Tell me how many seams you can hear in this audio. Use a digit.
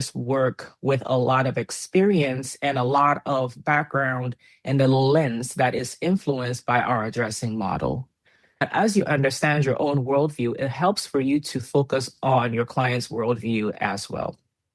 1